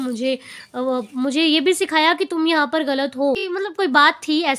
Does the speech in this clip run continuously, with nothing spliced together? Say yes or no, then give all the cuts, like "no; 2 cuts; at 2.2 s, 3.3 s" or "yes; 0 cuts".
no; 1 cut; at 3.5 s